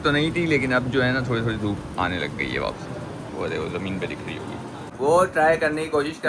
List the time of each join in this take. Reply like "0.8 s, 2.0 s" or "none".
4.8 s

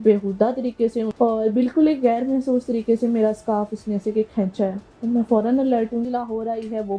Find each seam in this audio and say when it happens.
1.1 s, 6.1 s

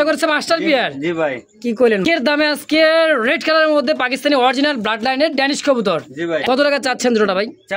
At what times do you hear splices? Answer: 2.3 s, 6.4 s

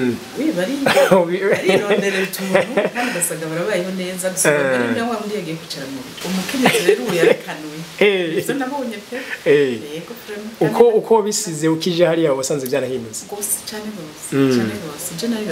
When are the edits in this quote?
6.2 s

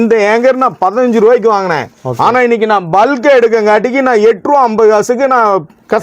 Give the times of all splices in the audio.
none

